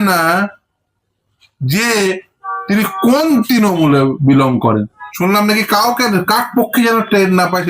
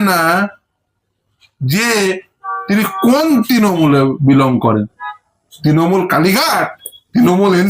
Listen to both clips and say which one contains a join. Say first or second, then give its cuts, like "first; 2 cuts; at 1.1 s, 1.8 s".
first; 1 cut; at 5.0 s